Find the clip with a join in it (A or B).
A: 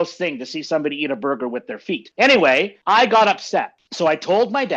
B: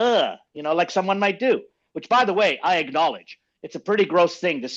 A